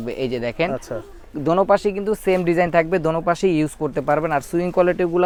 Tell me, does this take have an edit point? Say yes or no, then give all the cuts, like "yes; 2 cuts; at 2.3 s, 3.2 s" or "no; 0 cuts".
no; 0 cuts